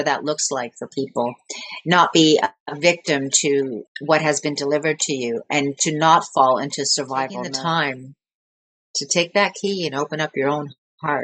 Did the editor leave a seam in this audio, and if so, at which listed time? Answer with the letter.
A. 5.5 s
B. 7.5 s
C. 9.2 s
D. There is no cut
B